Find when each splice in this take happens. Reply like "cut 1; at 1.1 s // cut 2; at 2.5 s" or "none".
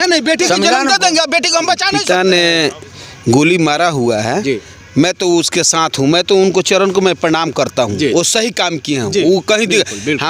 cut 1; at 1.9 s

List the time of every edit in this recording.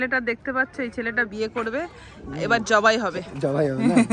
none

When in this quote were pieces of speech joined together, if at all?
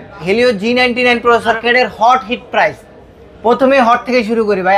cut 1; at 1.6 s

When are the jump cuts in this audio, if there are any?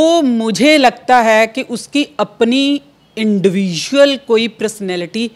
none

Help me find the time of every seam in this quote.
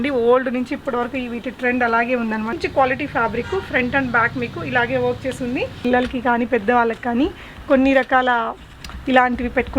cut 1; at 2.6 s // cut 2; at 5.8 s

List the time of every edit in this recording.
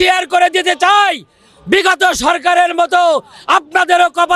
none

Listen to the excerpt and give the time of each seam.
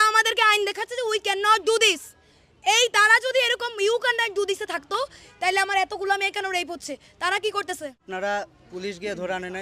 cut 1; at 8.0 s

